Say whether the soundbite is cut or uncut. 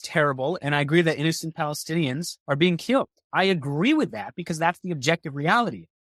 cut